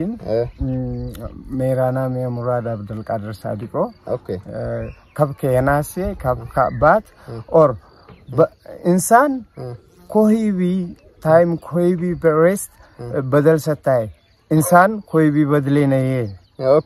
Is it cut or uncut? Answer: uncut